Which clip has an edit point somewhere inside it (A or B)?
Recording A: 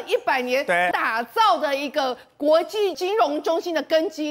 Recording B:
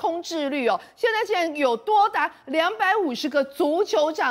A